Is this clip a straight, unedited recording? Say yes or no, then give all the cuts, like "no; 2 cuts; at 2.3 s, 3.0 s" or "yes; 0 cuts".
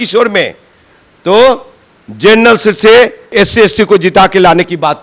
no; 1 cut; at 3.3 s